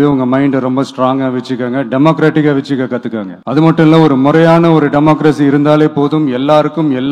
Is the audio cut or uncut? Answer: cut